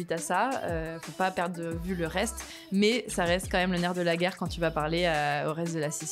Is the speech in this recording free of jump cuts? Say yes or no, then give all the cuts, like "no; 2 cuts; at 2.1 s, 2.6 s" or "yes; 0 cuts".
yes; 0 cuts